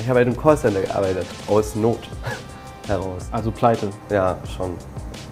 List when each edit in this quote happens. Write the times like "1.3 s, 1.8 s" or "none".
none